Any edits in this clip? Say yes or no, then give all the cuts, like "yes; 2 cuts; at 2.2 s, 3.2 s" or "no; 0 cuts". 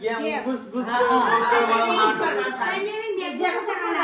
no; 0 cuts